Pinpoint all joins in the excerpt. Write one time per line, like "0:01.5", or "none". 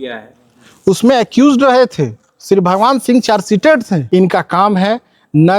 0:04.0